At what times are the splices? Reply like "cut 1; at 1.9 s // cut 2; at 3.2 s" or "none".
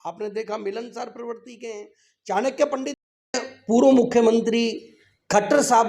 cut 1; at 3.3 s